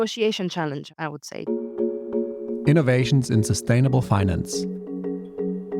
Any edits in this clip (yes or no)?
yes